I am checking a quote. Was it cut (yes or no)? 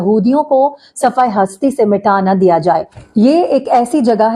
yes